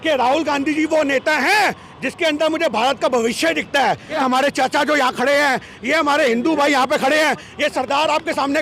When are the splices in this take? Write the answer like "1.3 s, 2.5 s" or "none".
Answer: 4.1 s